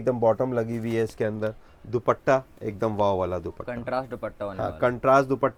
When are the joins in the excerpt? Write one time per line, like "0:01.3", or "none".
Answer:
none